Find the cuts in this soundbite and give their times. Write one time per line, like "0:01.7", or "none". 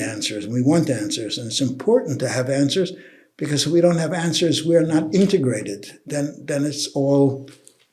none